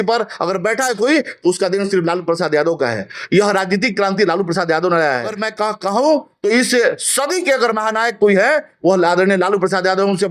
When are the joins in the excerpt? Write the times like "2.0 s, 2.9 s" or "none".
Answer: 5.4 s